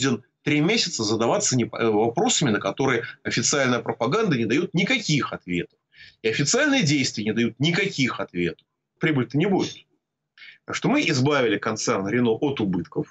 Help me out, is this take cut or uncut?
cut